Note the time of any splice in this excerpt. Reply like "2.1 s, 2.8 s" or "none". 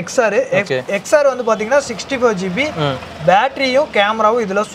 none